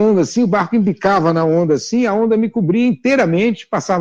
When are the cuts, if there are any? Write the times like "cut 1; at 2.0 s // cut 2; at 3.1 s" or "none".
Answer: none